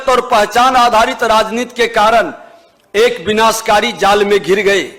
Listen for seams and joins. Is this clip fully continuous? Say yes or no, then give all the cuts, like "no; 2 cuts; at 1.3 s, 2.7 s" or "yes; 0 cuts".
yes; 0 cuts